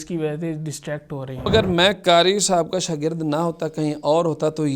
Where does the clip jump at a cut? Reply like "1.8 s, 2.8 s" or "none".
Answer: 1.5 s